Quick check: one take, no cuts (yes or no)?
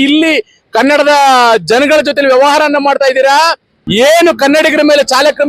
no